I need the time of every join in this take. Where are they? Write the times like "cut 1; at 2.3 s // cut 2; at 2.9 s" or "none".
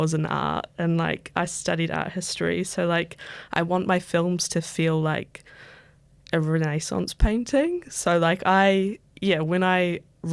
none